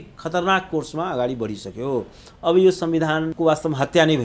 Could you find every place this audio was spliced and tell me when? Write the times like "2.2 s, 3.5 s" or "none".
3.3 s

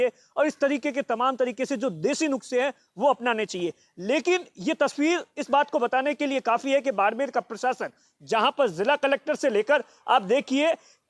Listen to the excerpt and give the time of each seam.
none

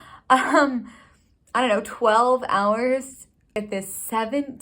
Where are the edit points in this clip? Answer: 3.5 s

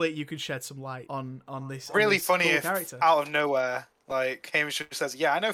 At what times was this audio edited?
1.0 s

